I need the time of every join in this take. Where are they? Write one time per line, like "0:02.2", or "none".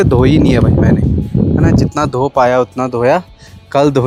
none